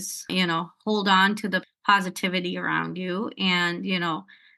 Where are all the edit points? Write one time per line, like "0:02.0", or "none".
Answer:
0:01.6